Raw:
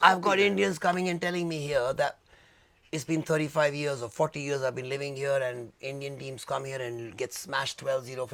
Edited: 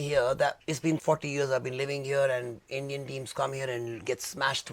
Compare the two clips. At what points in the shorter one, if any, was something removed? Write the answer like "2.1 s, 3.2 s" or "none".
0.9 s